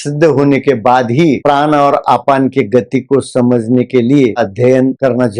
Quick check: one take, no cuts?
no; 1 cut; at 4.4 s

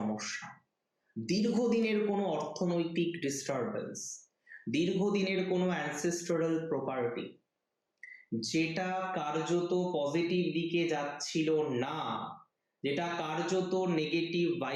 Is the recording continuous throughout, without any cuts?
yes; 0 cuts

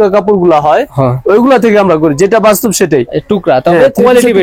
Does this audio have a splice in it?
no; 0 cuts

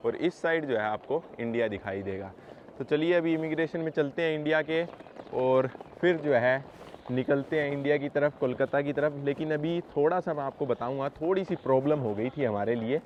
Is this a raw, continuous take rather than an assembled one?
yes; 0 cuts

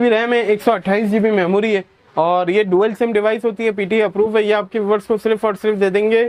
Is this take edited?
no; 0 cuts

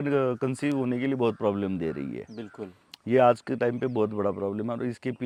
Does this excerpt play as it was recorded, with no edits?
yes; 0 cuts

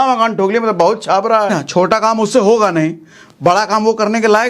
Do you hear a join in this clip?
yes; 1 cut; at 1.5 s

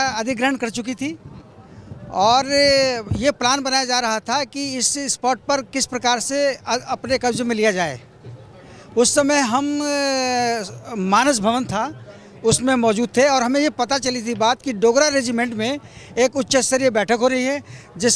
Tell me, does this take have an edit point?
no; 0 cuts

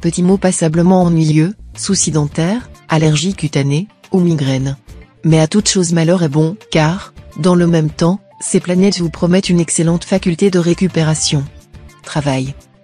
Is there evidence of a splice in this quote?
no; 0 cuts

